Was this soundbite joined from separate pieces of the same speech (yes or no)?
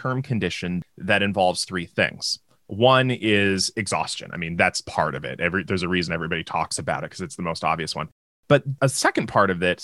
yes